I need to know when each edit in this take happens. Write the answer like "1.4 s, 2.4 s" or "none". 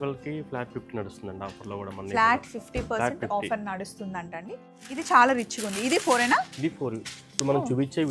4.4 s